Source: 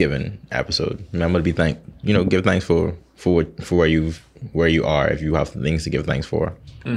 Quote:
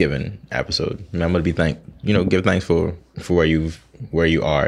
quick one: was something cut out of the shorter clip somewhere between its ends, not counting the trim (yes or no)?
yes